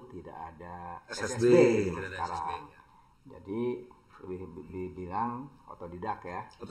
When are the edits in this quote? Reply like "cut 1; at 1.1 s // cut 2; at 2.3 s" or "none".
none